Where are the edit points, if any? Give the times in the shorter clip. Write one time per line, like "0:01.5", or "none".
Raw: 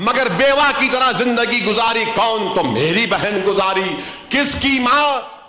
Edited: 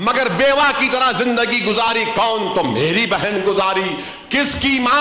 none